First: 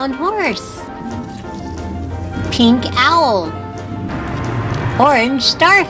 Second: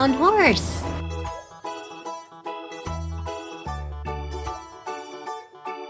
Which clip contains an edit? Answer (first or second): first